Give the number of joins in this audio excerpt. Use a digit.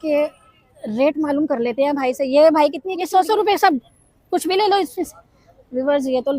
1